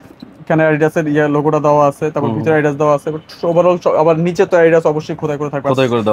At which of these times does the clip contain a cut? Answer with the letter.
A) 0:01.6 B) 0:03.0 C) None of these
C